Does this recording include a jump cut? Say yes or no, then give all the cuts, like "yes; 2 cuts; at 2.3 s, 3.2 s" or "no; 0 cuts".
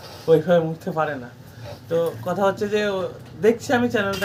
no; 0 cuts